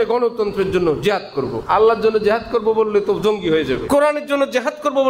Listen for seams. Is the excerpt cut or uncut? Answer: cut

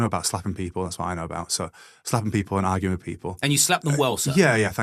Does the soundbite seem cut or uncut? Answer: uncut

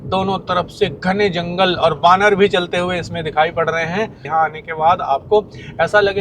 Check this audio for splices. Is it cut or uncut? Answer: cut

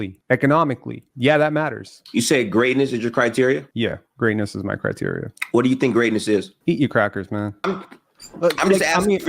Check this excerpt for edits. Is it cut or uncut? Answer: cut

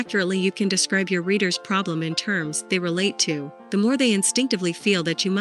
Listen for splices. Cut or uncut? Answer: uncut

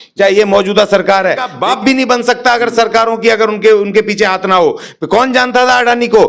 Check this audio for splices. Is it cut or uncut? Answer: cut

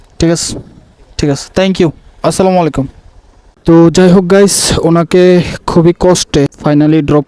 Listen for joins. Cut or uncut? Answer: uncut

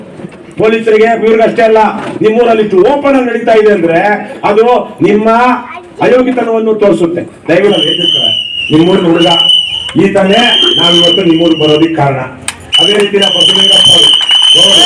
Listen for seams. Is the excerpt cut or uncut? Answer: cut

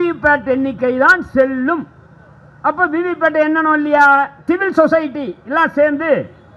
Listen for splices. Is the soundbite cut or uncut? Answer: cut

